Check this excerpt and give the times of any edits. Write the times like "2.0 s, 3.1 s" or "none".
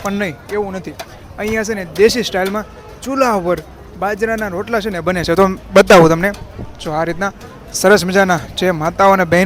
none